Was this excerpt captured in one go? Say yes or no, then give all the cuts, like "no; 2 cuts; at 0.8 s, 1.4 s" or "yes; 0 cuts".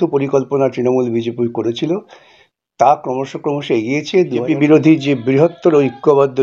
no; 1 cut; at 4.4 s